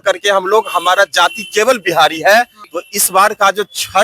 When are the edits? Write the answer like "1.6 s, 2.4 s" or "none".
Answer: 2.6 s